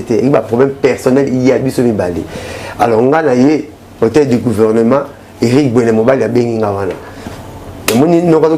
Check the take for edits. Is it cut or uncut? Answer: cut